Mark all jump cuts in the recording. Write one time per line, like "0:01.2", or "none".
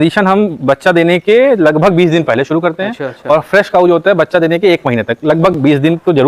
none